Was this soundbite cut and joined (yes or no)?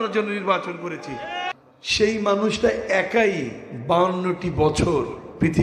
yes